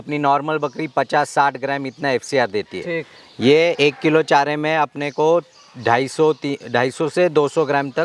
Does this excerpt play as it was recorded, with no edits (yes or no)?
yes